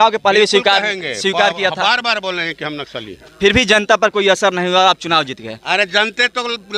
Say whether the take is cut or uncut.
uncut